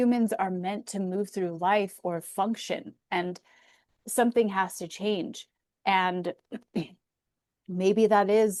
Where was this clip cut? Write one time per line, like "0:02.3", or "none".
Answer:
none